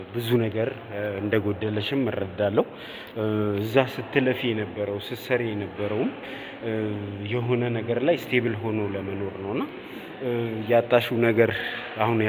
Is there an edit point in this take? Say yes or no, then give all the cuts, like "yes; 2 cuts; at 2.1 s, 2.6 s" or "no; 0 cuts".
no; 0 cuts